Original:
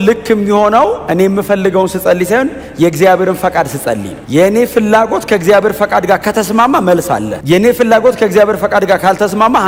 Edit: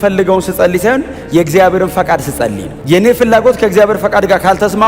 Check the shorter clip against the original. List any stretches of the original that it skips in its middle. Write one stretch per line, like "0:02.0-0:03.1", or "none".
0:04.2-0:07.3